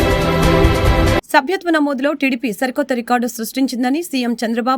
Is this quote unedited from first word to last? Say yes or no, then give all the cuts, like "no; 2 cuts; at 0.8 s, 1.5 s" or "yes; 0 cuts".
no; 1 cut; at 1.2 s